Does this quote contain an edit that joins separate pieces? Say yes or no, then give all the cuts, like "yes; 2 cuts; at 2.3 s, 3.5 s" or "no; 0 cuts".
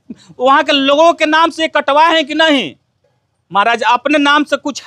no; 0 cuts